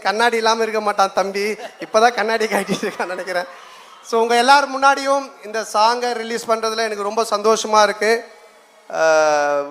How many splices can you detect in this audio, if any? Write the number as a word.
zero